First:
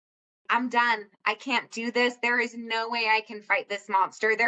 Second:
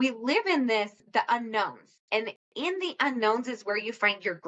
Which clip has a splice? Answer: second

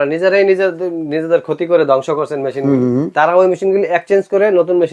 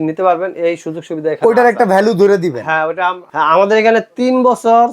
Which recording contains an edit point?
second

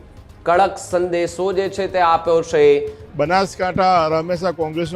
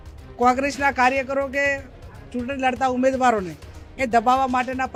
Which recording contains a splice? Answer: first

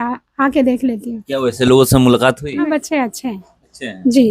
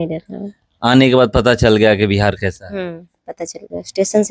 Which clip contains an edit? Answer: first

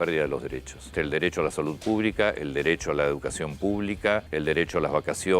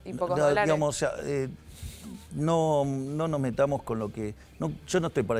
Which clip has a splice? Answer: first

